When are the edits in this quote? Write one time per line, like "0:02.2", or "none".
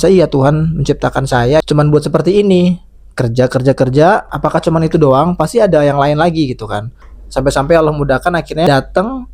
0:01.6
0:04.4
0:07.2
0:08.7